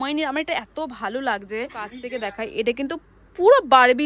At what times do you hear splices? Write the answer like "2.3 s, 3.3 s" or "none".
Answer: 2.0 s